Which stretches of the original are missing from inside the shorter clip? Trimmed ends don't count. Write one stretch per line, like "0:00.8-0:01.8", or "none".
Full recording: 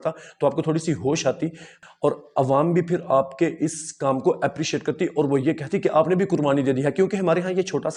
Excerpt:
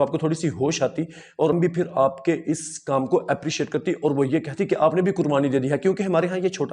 0:02.0-0:02.7